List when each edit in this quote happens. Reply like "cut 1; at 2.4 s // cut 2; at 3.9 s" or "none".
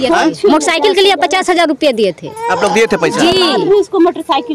none